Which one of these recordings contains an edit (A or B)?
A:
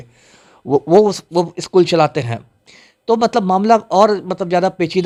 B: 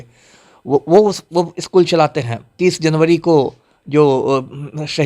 B